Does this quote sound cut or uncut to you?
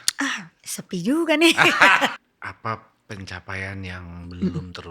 cut